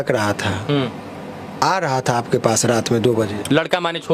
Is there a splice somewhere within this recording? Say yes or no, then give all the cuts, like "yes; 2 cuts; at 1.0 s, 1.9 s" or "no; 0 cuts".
no; 0 cuts